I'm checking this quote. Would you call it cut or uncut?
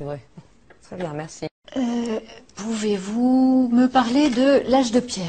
cut